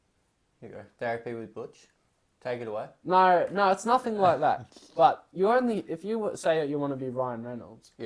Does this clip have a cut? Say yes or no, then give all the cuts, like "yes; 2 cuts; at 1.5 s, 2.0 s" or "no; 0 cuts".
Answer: no; 0 cuts